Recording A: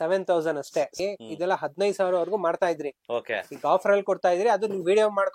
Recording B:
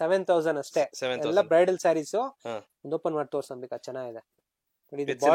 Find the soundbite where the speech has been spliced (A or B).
A